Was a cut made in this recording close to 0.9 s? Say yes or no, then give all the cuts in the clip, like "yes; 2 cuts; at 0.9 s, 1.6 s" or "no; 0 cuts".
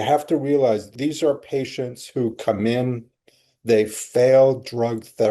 yes; 1 cut; at 0.9 s